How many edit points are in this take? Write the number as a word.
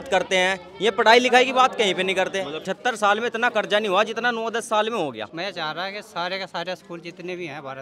two